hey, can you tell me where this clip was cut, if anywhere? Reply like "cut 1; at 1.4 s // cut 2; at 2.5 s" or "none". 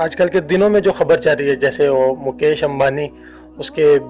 none